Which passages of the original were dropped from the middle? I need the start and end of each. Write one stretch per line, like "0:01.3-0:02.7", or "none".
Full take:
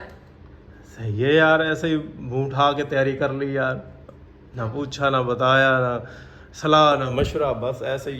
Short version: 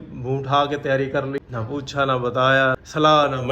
0:03.5-0:04.5
0:05.8-0:06.4